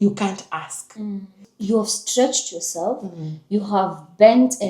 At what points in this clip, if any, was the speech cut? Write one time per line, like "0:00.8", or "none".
0:01.5